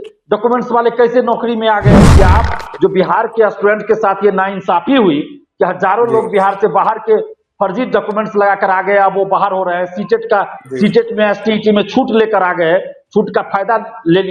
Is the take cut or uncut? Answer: cut